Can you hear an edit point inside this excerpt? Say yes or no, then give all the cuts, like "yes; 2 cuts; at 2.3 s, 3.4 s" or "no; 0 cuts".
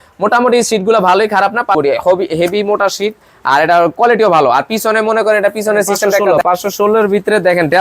yes; 2 cuts; at 1.7 s, 6.3 s